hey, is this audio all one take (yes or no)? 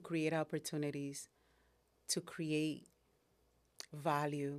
yes